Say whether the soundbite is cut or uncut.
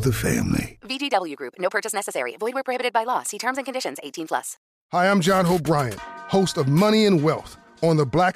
cut